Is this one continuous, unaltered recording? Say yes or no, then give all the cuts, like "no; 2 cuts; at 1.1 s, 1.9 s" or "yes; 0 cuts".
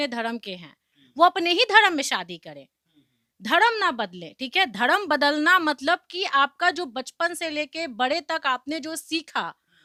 yes; 0 cuts